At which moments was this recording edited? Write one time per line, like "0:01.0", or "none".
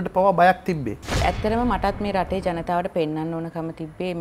0:01.1